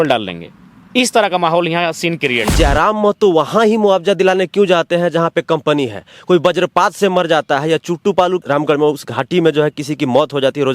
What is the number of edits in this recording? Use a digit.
2